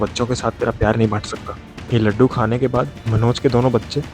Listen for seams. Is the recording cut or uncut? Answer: uncut